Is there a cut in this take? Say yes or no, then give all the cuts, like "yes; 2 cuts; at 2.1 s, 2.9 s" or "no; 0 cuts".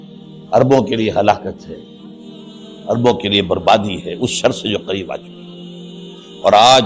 no; 0 cuts